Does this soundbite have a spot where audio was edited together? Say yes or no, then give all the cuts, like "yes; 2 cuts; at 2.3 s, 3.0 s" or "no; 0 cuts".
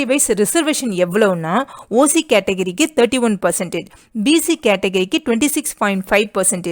no; 0 cuts